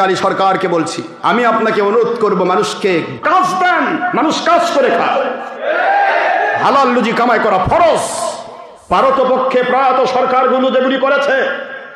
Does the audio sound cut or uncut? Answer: uncut